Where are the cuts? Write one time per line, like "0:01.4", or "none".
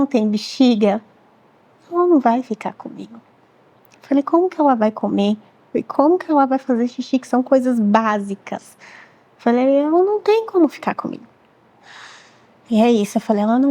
none